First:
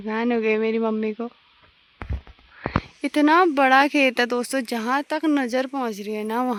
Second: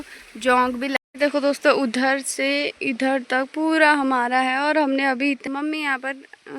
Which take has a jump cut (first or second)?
second